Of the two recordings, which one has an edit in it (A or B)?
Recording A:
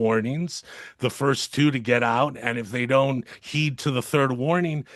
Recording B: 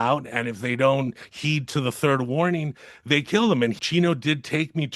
B